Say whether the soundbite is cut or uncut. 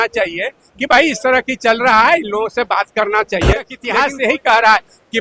cut